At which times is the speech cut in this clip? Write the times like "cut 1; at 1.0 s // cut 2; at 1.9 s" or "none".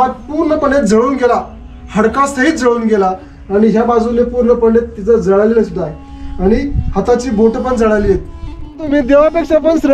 cut 1; at 8.8 s